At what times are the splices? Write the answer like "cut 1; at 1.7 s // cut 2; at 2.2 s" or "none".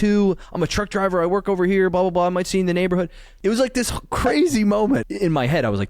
cut 1; at 3.2 s // cut 2; at 5.0 s